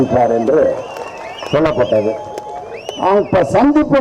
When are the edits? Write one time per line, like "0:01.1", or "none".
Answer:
none